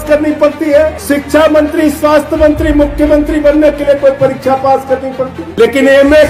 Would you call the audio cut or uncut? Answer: cut